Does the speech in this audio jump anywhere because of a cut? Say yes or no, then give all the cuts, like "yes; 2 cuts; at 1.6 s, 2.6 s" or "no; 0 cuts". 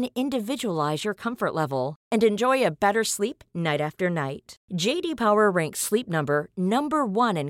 no; 0 cuts